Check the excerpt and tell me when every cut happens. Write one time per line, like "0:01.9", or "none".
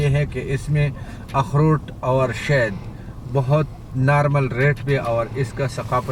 none